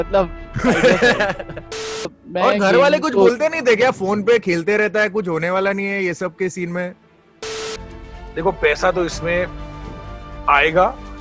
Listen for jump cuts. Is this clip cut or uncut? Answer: cut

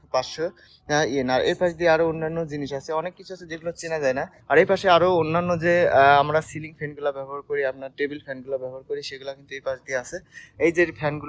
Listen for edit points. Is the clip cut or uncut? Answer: cut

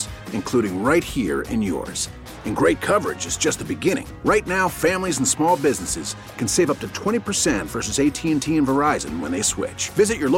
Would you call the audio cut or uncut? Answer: uncut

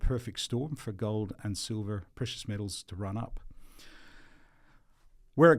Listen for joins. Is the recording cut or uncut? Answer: uncut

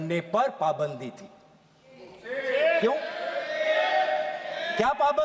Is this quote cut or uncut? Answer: uncut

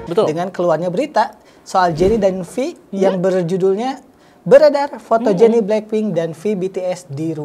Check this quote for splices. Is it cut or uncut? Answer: uncut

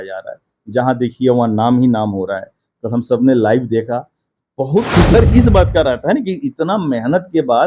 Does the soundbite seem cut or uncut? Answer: cut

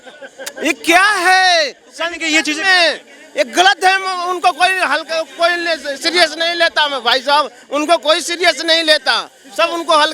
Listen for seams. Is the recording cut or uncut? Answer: uncut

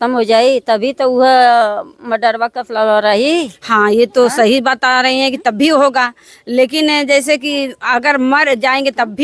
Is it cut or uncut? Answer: uncut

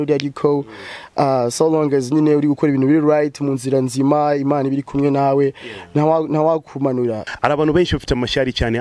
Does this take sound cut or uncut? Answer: cut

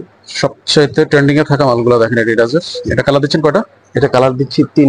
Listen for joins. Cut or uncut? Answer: uncut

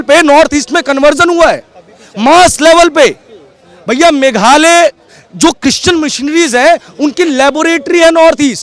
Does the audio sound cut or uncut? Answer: uncut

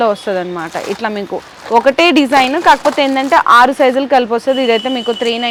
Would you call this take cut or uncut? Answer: uncut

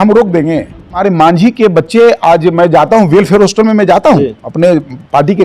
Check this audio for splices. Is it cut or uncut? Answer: cut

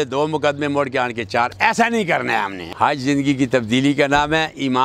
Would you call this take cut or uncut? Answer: cut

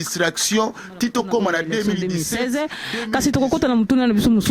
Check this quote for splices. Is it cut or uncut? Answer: cut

